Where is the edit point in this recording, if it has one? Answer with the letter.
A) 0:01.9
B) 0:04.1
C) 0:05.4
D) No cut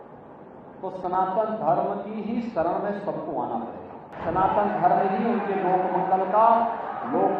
B